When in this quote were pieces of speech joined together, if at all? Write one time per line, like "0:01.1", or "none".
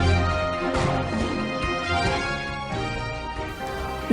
none